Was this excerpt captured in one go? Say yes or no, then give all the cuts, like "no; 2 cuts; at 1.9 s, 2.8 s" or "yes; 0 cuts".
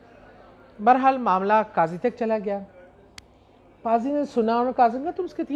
yes; 0 cuts